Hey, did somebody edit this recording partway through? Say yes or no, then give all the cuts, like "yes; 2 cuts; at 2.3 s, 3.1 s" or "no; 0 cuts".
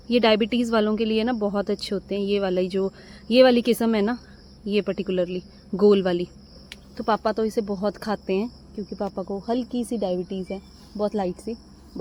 no; 0 cuts